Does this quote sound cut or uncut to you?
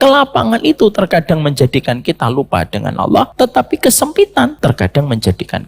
cut